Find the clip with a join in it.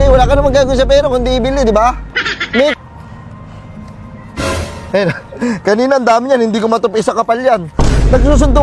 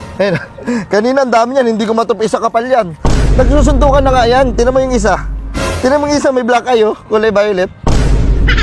first; 1 cut; at 2.7 s

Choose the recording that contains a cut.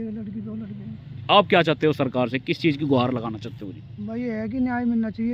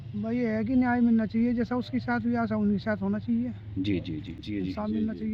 second; 1 cut; at 4.3 s

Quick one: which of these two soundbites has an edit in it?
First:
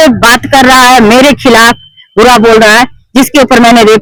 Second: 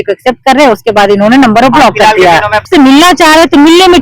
second; 1 cut; at 2.6 s

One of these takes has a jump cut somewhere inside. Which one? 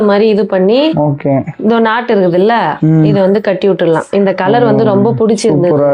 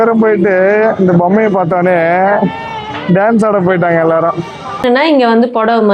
second; 1 cut; at 4.8 s

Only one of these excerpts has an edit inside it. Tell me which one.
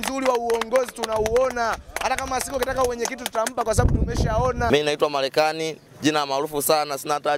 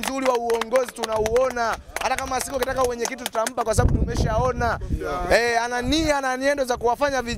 first; 1 cut; at 4.7 s

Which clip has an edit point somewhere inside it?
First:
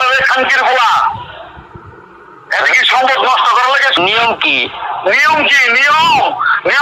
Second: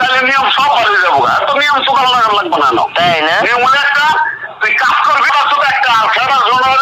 first; 1 cut; at 1.2 s

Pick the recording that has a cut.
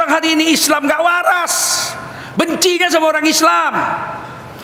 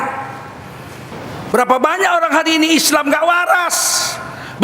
second; 1 cut; at 1.1 s

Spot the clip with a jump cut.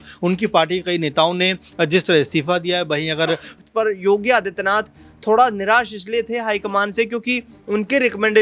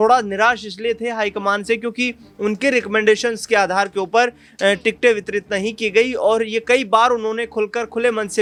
first; 1 cut; at 3.6 s

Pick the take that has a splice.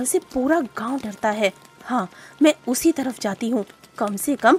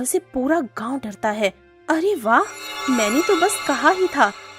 second; 1 cut; at 1.7 s

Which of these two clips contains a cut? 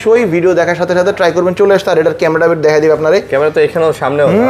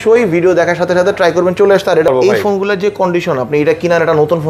second; 1 cut; at 2.1 s

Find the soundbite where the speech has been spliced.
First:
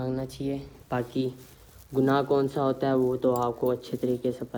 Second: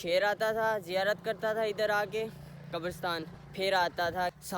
second; 1 cut; at 3.4 s

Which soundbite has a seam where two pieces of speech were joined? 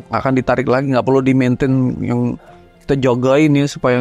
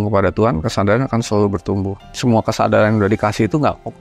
second; 1 cut; at 2.0 s

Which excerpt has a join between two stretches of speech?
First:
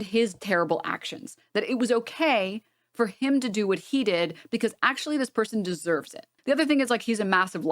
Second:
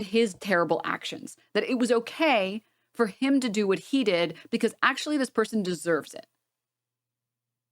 first; 1 cut; at 6.3 s

